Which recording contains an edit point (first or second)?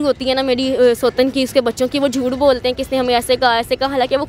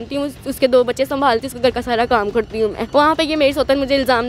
second